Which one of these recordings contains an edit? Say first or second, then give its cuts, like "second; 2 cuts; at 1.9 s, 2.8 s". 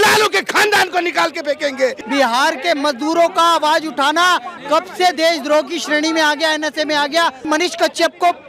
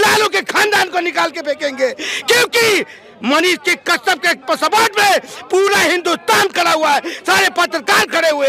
first; 2 cuts; at 2.0 s, 7.5 s